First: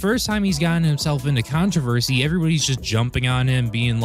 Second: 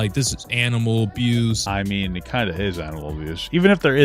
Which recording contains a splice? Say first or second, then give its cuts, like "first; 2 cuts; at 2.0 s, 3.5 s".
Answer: second; 1 cut; at 1.6 s